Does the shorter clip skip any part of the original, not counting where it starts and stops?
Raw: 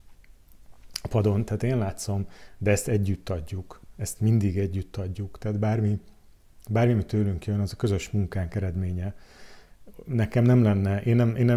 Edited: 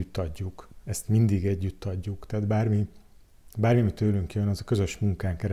no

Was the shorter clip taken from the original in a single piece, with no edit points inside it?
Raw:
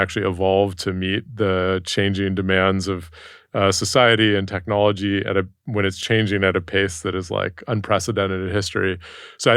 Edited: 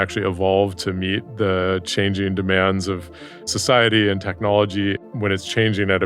no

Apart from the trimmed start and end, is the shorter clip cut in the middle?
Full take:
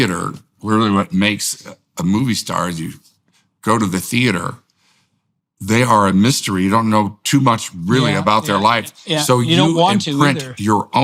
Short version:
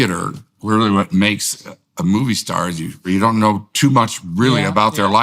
yes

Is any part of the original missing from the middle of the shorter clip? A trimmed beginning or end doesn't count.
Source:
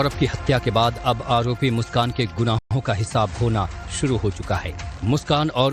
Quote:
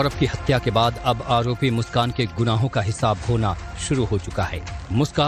yes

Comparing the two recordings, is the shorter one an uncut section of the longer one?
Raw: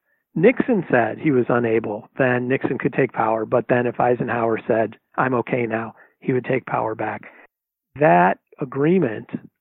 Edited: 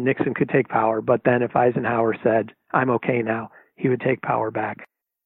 yes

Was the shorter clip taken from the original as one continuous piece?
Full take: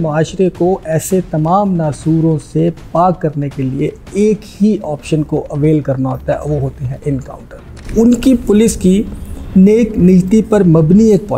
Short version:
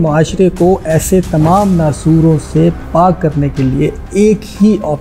yes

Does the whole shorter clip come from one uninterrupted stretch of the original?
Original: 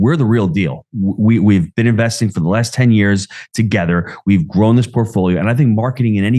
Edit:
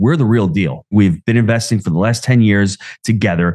no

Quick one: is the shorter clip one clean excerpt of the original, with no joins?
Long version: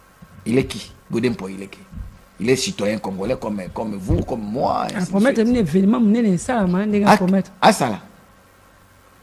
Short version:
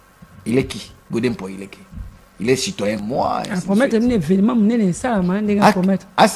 no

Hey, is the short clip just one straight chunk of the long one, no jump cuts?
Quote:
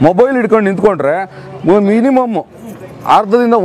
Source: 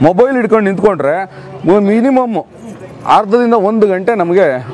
yes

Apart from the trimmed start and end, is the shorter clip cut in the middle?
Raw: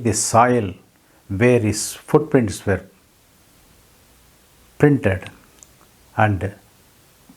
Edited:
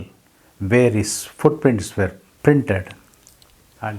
yes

